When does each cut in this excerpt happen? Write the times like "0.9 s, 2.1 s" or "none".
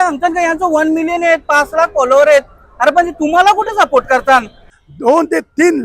4.6 s